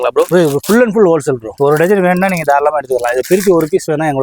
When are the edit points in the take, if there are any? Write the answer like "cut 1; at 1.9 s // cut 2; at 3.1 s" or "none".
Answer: cut 1; at 1.5 s